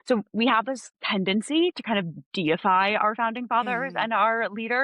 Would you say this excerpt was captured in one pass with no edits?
no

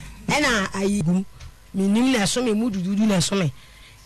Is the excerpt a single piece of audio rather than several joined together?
no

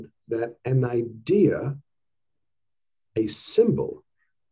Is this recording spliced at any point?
no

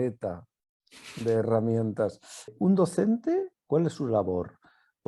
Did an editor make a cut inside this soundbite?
yes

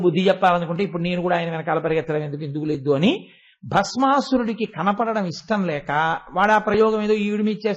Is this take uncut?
yes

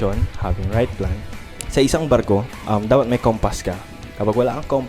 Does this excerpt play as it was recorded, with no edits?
no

